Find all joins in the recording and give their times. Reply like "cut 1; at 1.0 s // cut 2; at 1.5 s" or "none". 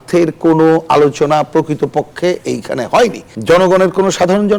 cut 1; at 3.3 s

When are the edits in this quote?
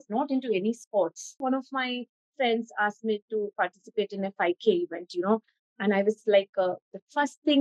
cut 1; at 1.4 s

